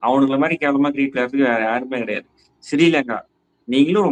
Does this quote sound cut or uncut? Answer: uncut